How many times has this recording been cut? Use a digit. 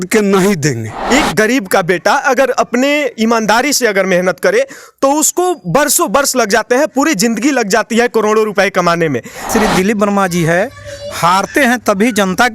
2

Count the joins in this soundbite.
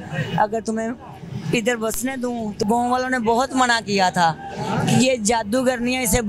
1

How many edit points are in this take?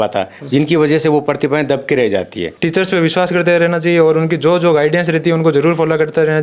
1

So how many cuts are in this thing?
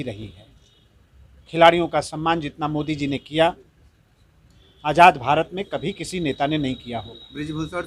0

